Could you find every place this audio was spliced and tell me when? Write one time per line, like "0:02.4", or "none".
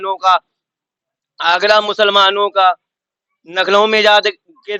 none